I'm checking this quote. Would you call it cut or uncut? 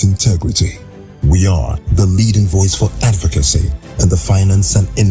cut